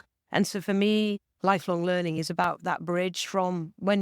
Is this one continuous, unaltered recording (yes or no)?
no